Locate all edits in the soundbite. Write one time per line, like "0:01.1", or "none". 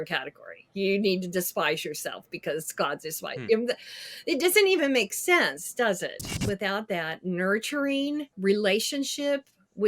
0:06.3
0:08.3